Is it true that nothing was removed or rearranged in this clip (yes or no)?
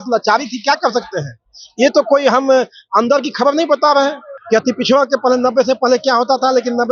no